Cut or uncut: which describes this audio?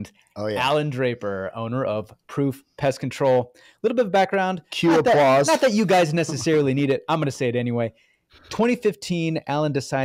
uncut